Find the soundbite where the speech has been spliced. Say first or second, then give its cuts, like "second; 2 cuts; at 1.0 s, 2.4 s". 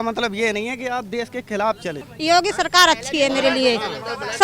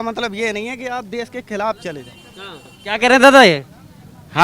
first; 1 cut; at 2.1 s